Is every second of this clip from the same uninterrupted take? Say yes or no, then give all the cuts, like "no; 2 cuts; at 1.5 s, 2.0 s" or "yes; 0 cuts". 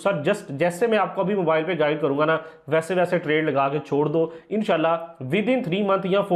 yes; 0 cuts